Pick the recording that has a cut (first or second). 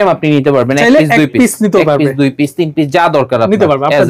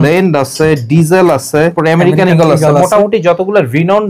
second